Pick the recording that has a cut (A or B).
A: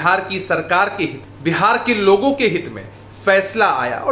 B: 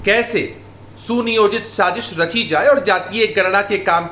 A